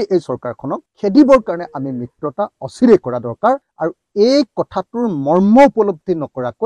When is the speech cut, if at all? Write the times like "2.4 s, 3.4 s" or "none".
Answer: none